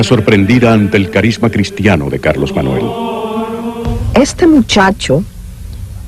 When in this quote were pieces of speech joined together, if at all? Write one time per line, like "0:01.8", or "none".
0:01.4